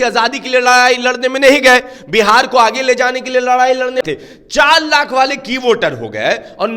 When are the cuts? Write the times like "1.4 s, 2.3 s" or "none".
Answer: 4.0 s